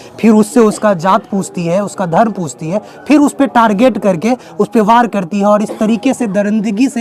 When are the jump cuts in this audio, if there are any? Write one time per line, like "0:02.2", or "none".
none